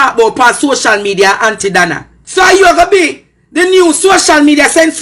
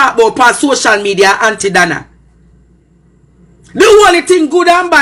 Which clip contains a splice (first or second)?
first